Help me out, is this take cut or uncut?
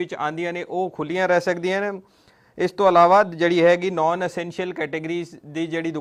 uncut